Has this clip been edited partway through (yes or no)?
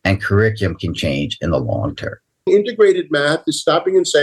yes